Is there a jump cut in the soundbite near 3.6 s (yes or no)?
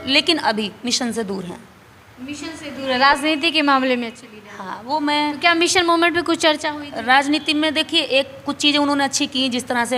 no